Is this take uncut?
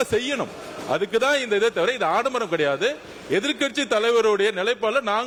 yes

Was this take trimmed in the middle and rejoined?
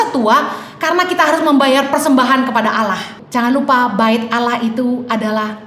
yes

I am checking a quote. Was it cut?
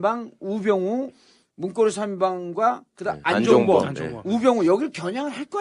yes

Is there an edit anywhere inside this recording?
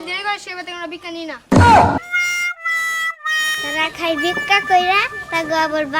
no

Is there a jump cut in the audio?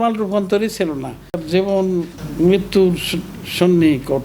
yes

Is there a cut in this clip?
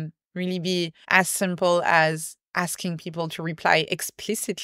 yes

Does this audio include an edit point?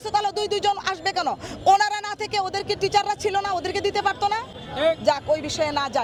no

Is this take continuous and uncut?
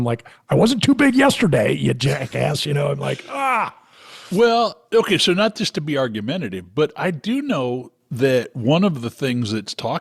yes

